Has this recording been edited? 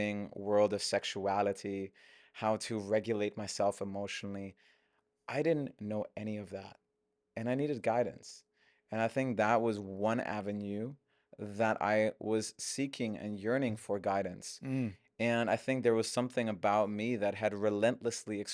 no; 0 cuts

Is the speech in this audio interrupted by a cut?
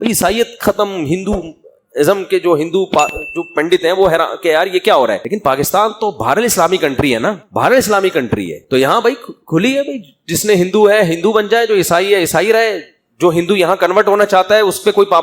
yes; 2 cuts; at 5.3 s, 7.4 s

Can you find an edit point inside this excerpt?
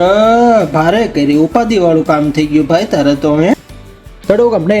yes; 1 cut; at 3.7 s

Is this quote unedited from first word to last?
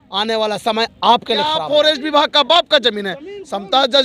no; 1 cut; at 1.6 s

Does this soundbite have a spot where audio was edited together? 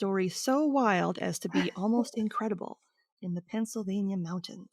no; 0 cuts

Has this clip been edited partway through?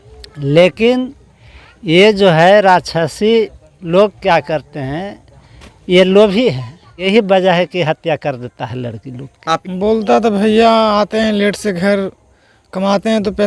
yes; 2 cuts; at 6.9 s, 9.7 s

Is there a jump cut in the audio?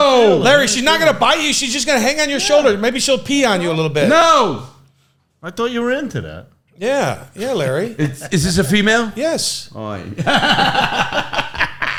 no; 0 cuts

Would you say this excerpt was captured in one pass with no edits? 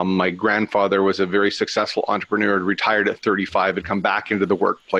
yes; 0 cuts

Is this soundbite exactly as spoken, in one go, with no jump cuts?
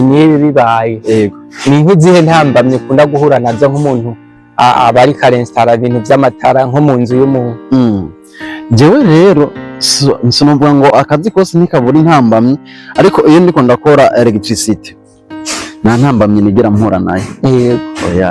yes; 0 cuts

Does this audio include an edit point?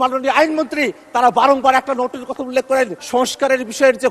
yes; 1 cut; at 3.0 s

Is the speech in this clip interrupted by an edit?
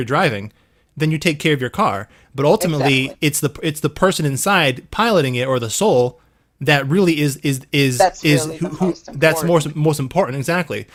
no; 0 cuts

